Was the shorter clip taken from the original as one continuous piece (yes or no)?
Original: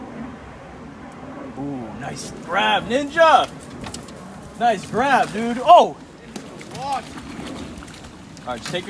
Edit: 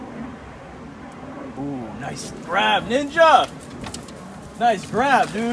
yes